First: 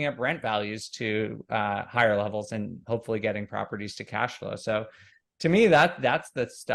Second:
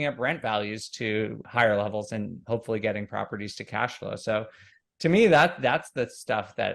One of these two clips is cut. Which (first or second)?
second